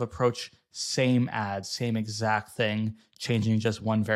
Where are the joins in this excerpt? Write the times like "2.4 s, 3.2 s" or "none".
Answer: none